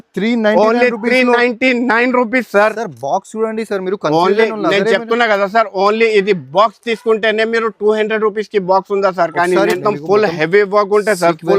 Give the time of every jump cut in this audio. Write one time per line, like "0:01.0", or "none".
0:09.8